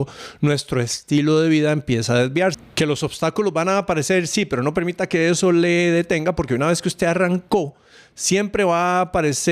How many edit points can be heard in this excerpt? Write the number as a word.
one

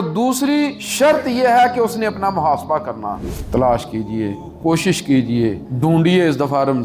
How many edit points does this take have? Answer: three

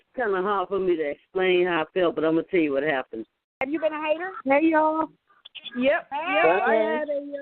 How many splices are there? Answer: one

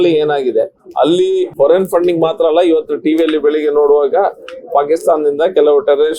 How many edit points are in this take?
one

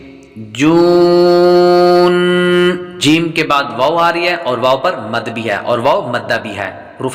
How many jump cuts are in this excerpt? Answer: one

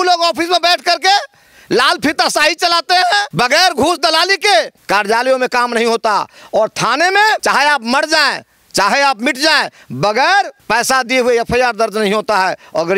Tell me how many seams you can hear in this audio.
four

